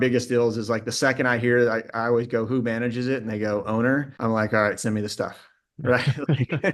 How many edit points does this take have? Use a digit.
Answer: 1